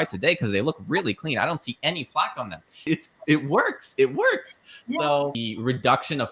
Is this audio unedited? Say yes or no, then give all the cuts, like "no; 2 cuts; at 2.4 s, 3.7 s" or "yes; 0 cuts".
no; 2 cuts; at 2.8 s, 5.4 s